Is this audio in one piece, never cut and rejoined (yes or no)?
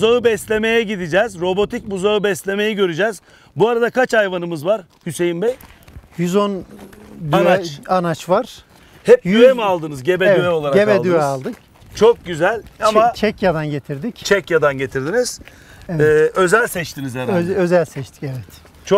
yes